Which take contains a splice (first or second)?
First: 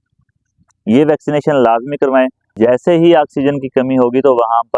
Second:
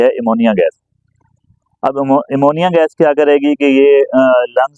first